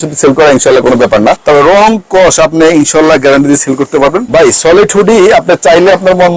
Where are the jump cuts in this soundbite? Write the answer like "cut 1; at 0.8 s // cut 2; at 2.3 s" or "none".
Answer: cut 1; at 1.4 s // cut 2; at 4.3 s